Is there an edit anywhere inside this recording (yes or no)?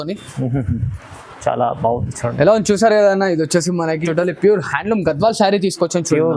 yes